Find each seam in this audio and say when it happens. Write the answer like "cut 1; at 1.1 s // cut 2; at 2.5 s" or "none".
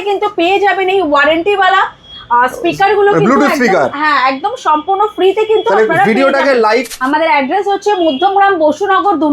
cut 1; at 6.9 s